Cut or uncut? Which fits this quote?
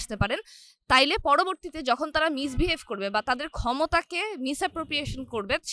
uncut